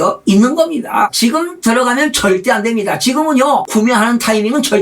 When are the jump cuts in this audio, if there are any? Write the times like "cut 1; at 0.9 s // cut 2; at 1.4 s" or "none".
cut 1; at 1.1 s // cut 2; at 3.7 s